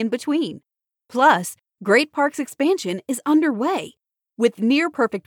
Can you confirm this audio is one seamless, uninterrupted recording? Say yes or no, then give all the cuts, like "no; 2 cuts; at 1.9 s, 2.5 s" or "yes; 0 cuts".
yes; 0 cuts